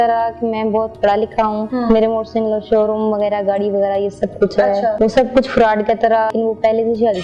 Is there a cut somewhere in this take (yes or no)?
yes